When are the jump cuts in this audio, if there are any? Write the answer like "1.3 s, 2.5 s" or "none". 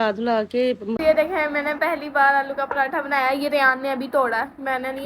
1.0 s

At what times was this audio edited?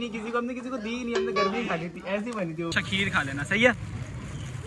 2.7 s

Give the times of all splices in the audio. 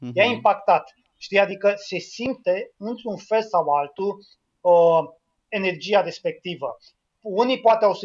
none

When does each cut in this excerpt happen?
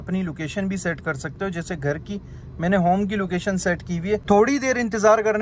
4.2 s

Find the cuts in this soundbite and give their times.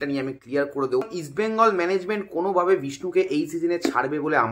1.0 s

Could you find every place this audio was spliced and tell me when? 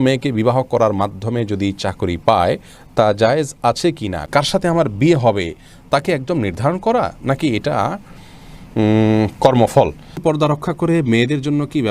4.3 s, 10.2 s

